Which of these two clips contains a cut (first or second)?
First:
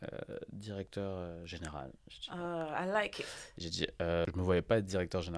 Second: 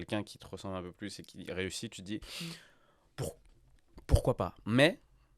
first